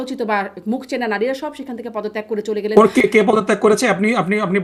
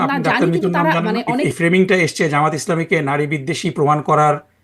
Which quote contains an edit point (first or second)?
second